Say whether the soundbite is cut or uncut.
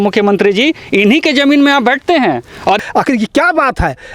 cut